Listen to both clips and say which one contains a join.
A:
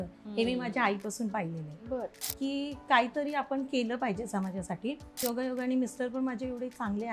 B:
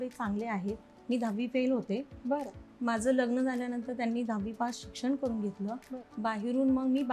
A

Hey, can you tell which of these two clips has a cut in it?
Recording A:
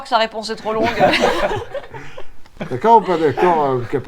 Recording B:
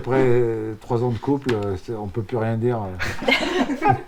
A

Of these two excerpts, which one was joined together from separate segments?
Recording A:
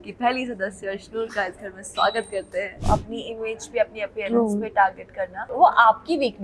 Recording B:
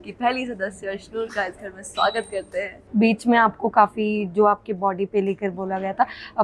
A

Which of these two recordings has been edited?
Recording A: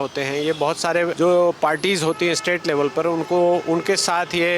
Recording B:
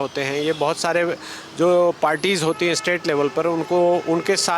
A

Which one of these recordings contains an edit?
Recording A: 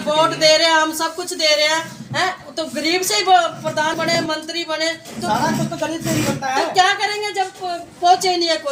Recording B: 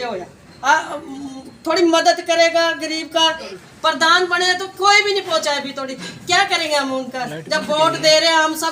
B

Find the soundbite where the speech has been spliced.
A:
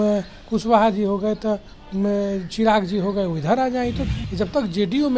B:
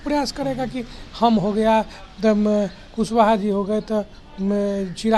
A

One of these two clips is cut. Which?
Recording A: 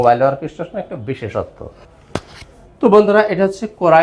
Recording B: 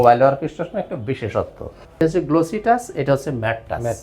B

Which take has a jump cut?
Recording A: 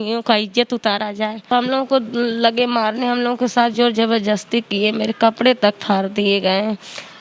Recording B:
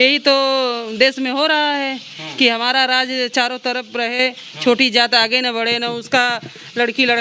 A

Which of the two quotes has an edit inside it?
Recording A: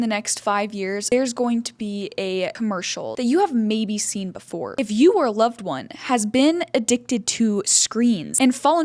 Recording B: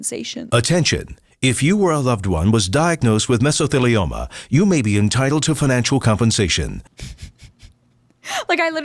A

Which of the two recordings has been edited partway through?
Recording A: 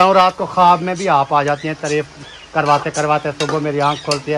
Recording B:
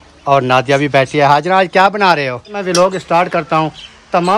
B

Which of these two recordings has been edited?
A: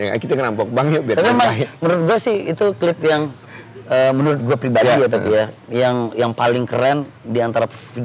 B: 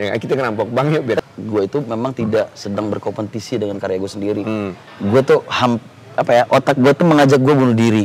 B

